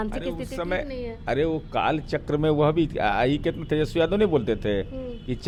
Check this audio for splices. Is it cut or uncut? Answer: uncut